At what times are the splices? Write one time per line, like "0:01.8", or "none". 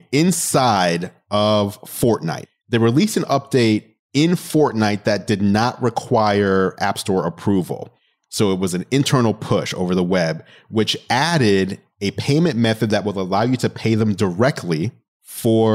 0:02.4
0:04.0